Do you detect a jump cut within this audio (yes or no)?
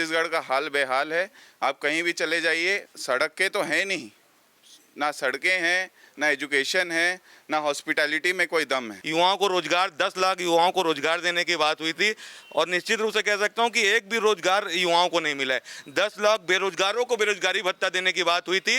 yes